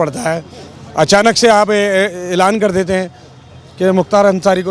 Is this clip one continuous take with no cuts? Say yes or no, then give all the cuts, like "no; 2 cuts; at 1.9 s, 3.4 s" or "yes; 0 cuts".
yes; 0 cuts